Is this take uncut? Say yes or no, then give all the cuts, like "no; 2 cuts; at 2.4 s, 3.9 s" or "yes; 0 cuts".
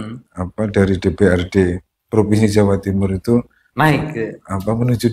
yes; 0 cuts